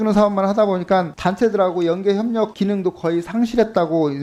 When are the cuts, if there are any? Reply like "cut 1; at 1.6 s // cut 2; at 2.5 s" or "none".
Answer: none